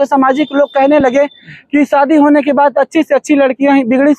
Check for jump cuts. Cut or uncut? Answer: uncut